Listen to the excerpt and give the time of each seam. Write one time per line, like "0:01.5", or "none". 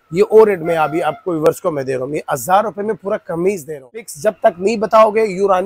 0:04.1